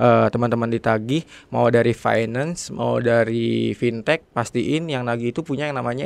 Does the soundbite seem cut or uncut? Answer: uncut